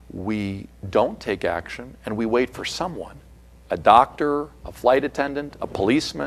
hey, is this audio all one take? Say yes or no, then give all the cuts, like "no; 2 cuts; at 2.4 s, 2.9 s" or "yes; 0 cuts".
yes; 0 cuts